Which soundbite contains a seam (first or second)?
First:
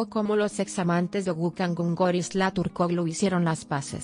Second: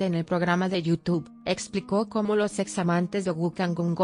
second